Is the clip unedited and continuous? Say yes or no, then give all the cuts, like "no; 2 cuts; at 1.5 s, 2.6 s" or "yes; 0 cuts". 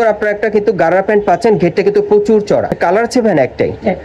no; 1 cut; at 2.8 s